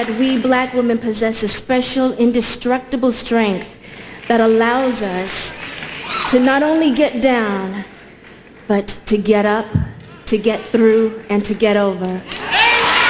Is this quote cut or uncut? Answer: uncut